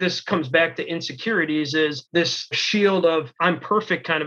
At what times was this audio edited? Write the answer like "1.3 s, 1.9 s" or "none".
2.5 s, 3.3 s